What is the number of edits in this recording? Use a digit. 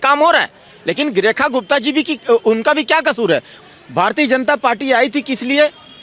1